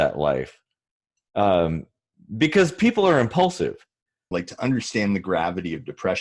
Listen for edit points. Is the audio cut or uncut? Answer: cut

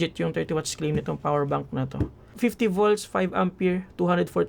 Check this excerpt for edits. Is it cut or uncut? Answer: cut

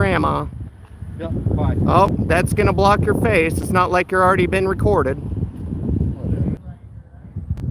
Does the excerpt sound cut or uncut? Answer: cut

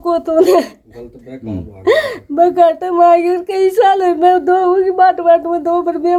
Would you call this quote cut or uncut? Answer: uncut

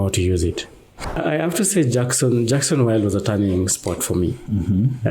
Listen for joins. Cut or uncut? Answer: cut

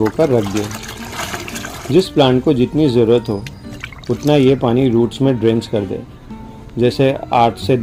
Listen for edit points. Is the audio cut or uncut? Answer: uncut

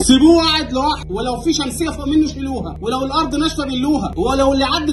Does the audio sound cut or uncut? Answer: cut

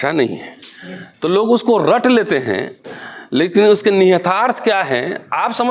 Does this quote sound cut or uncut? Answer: uncut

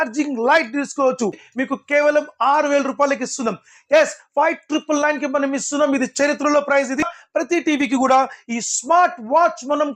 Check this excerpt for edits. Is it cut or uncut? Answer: cut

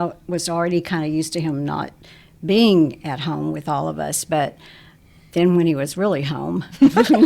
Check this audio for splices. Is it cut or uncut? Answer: uncut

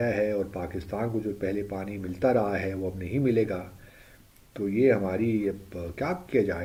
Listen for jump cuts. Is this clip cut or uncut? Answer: uncut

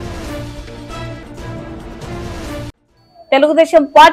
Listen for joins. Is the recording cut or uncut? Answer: cut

